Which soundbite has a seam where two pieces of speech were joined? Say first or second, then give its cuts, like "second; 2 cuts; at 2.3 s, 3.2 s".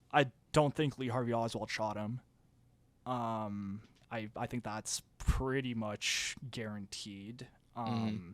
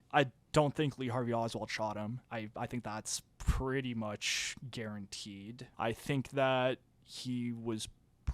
second; 2 cuts; at 2.2 s, 5.6 s